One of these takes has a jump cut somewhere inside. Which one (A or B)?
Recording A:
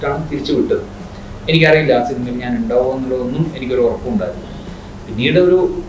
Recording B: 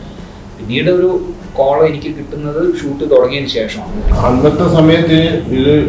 B